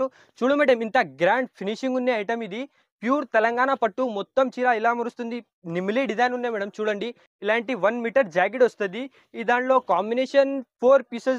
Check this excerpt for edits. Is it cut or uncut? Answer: uncut